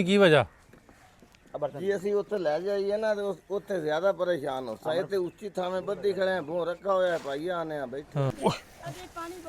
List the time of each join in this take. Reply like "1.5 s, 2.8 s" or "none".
8.3 s